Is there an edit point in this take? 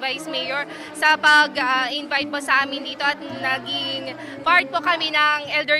yes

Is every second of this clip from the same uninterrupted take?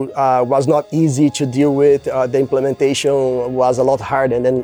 yes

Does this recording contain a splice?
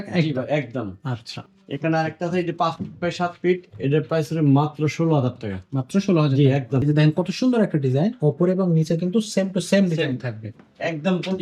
yes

